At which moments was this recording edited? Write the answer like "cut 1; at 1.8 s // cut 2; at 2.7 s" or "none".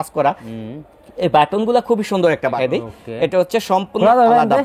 cut 1; at 2.6 s